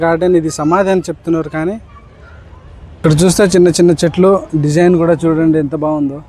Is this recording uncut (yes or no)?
no